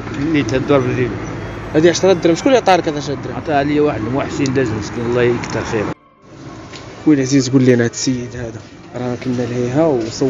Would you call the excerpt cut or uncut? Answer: cut